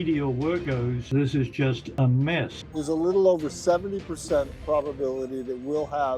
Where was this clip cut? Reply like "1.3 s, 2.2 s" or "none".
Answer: 2.6 s